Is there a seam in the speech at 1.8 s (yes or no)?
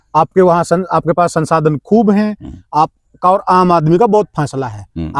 no